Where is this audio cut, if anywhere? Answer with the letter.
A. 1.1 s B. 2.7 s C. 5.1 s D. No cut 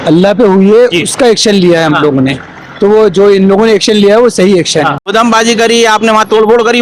C